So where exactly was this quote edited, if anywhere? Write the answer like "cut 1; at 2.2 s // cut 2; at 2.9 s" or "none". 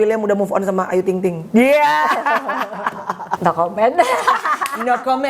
cut 1; at 3.3 s

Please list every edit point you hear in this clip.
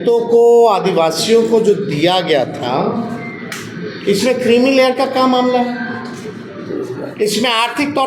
none

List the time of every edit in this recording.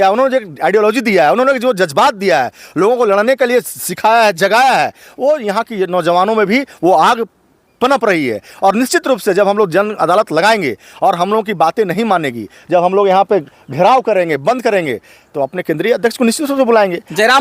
none

